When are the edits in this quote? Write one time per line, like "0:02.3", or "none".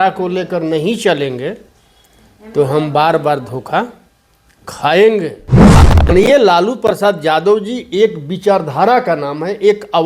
0:05.7